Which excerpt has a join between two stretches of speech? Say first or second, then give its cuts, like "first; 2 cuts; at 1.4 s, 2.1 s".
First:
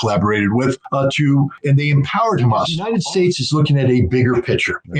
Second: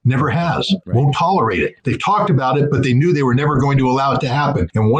first; 1 cut; at 2.8 s